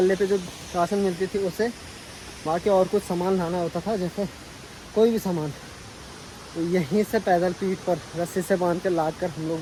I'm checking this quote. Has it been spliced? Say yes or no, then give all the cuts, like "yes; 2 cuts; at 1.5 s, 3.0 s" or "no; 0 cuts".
no; 0 cuts